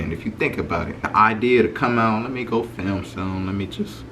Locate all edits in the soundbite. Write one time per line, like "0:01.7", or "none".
0:01.0